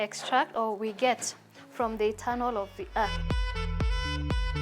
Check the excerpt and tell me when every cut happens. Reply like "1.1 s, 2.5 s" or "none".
3.2 s